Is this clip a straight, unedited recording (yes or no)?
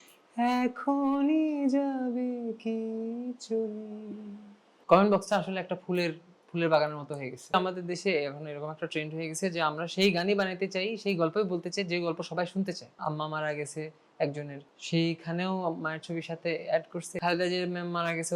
no